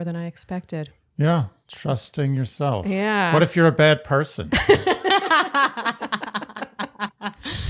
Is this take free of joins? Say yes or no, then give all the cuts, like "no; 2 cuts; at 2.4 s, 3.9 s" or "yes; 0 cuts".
yes; 0 cuts